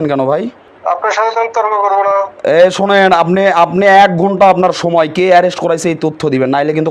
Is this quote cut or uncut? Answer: uncut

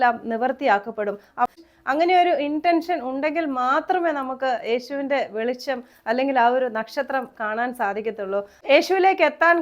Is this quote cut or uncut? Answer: cut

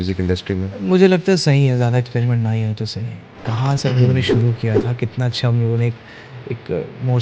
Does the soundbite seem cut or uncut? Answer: cut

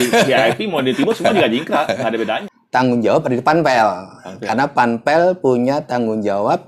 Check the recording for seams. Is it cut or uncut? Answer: cut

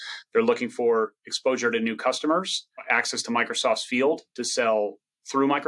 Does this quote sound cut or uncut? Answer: cut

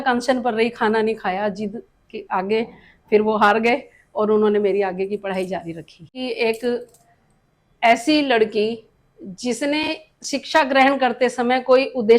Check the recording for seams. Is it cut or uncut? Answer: cut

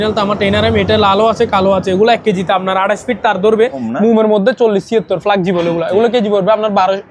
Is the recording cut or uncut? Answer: cut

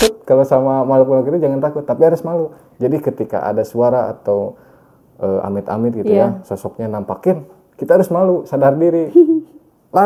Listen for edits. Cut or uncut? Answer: uncut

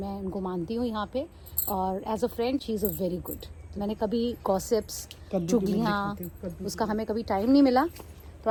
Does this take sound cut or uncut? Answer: uncut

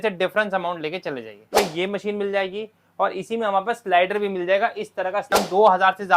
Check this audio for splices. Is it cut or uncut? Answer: cut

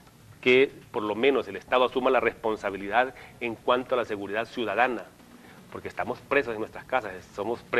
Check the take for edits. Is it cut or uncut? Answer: uncut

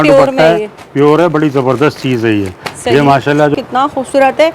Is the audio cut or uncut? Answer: cut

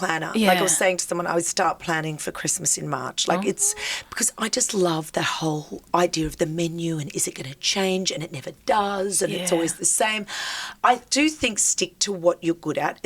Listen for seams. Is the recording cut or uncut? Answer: uncut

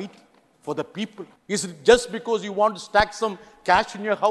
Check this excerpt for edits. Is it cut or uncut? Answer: cut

